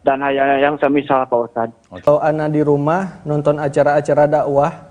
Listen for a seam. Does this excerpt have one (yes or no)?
yes